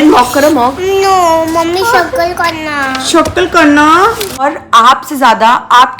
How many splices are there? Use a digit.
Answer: 1